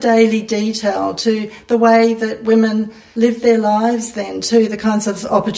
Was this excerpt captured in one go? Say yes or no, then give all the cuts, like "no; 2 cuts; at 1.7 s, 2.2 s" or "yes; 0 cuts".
no; 1 cut; at 3.0 s